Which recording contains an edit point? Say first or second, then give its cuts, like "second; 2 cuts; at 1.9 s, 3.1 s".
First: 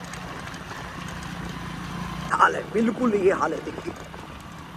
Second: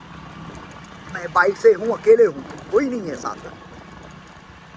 first; 1 cut; at 2.3 s